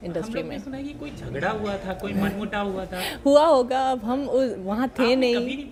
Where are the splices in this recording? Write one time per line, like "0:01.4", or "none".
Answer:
none

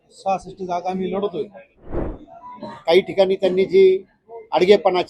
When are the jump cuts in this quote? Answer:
0:02.0

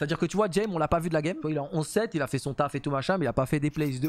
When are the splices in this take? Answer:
0:01.4

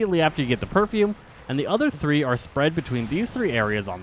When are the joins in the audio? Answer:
none

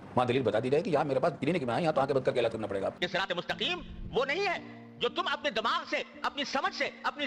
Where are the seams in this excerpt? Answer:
0:03.0

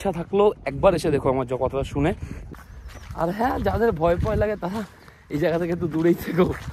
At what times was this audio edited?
0:02.5

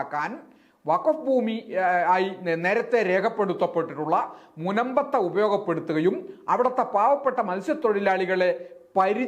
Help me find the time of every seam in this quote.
none

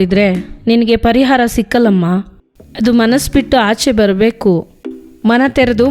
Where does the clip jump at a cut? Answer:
none

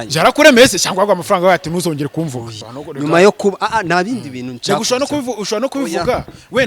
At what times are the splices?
0:02.5

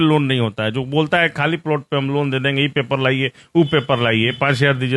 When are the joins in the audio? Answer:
none

